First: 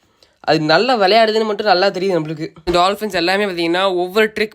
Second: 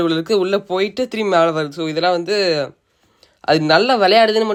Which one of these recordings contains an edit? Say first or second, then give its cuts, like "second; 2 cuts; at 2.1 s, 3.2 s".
first; 1 cut; at 2.7 s